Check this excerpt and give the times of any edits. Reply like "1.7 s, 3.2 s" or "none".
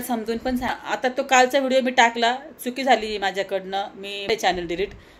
1.0 s, 4.3 s